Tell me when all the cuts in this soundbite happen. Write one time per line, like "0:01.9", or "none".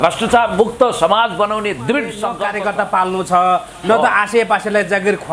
0:02.3